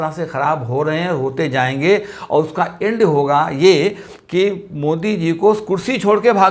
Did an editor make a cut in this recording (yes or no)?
no